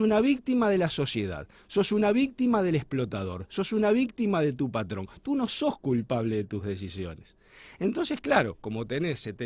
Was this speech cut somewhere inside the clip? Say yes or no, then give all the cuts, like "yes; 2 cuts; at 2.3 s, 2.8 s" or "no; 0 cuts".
no; 0 cuts